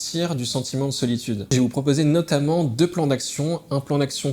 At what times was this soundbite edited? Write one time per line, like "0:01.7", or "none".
0:01.5